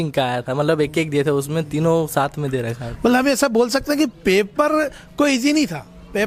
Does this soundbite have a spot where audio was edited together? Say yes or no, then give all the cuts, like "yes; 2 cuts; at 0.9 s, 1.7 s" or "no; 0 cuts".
no; 0 cuts